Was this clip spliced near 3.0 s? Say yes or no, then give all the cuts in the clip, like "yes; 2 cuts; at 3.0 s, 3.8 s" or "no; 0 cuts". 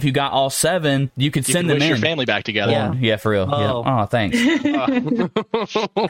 no; 1 cut; at 1.1 s